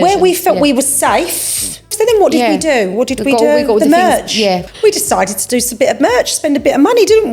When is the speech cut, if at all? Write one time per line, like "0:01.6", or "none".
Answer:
0:01.8
0:04.6